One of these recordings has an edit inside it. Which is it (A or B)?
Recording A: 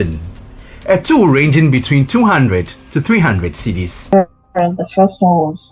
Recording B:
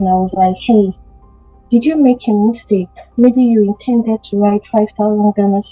A